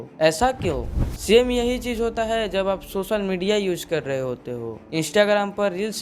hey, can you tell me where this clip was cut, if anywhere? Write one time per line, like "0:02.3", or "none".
0:00.9